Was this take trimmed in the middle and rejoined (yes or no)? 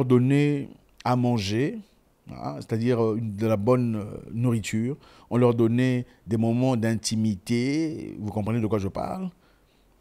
no